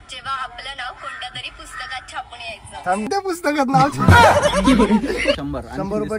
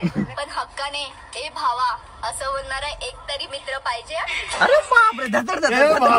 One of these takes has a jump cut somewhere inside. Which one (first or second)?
first